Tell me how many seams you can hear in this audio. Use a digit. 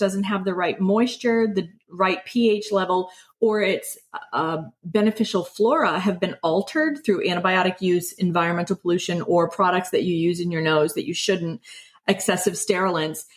0